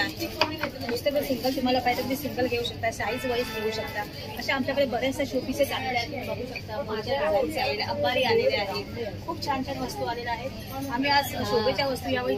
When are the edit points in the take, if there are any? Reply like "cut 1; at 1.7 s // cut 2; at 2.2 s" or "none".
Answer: none